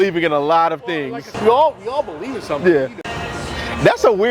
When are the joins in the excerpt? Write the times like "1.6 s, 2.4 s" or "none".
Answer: 1.2 s, 3.1 s